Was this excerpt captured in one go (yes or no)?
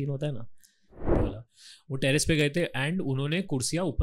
no